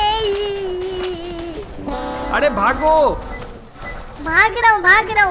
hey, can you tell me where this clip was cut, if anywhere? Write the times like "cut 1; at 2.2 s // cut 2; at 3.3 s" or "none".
none